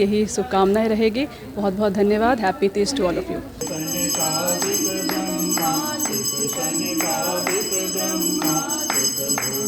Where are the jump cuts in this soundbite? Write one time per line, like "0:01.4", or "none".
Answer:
none